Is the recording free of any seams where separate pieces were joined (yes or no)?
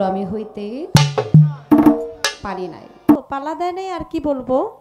no